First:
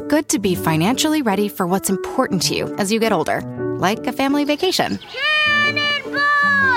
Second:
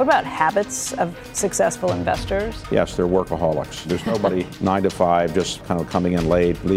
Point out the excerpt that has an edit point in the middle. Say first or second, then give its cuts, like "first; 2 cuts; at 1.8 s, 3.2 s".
second; 3 cuts; at 2.6 s, 4.1 s, 5.6 s